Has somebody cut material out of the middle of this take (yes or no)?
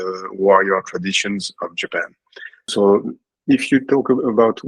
yes